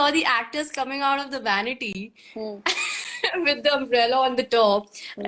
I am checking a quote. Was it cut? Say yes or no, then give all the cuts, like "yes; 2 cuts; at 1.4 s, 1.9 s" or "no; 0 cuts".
no; 0 cuts